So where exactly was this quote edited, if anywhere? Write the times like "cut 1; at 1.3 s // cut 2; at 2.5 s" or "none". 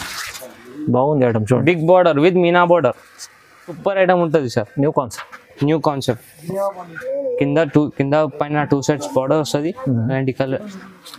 cut 1; at 3.8 s

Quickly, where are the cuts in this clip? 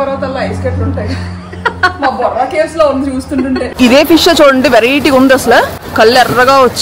cut 1; at 3.7 s // cut 2; at 5.8 s

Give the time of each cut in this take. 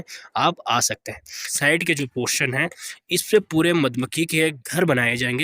cut 1; at 1.4 s

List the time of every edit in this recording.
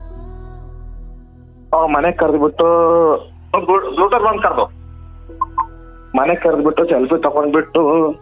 none

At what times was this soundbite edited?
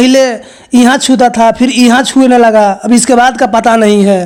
none

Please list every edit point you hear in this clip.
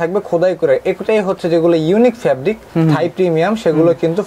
none

